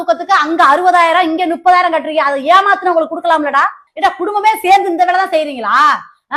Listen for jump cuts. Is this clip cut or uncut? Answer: cut